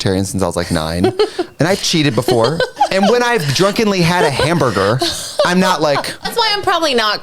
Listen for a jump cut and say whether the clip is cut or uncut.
cut